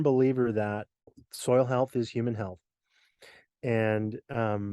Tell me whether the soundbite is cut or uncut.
cut